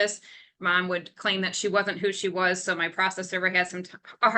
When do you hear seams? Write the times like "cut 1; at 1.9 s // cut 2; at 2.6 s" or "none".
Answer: none